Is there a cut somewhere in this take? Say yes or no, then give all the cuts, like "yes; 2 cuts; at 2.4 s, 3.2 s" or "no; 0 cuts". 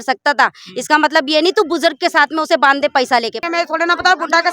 yes; 1 cut; at 3.4 s